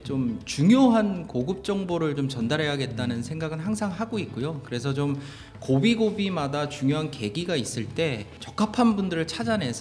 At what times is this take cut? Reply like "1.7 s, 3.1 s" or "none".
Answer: 8.4 s